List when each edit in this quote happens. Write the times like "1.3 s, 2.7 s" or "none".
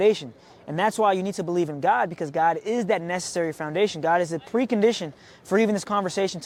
none